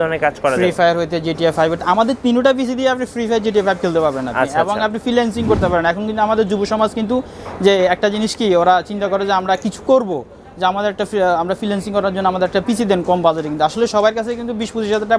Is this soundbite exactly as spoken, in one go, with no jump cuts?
yes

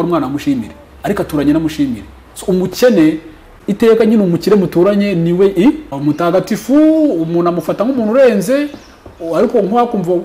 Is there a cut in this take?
yes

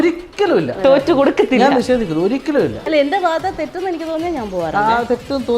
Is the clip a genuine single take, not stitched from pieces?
no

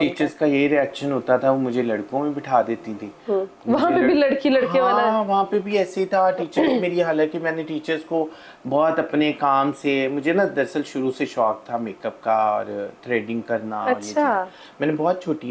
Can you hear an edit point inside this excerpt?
no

